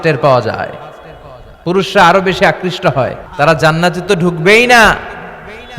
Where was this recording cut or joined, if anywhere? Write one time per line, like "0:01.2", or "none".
0:03.2